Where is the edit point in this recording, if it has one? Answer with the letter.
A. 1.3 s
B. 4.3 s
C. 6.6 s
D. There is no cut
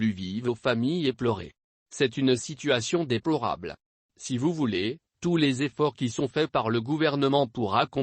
A